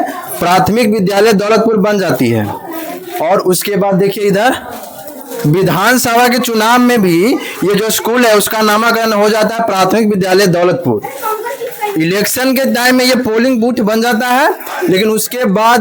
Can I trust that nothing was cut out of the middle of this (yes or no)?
yes